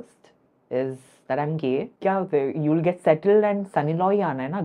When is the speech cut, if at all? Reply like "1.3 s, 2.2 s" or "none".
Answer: 1.9 s